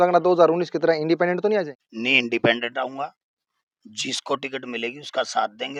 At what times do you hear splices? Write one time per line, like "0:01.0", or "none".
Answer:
none